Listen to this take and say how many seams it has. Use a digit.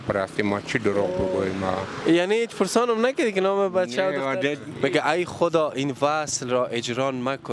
1